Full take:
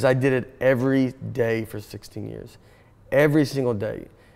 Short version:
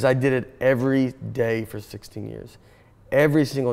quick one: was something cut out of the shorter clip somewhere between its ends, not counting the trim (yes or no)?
no